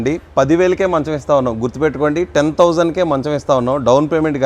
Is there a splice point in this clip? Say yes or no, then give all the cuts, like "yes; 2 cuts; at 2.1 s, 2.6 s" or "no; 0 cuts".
no; 0 cuts